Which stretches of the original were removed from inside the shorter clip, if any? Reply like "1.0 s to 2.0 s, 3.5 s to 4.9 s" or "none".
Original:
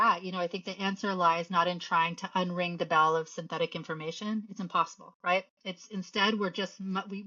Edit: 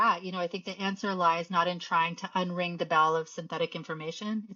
none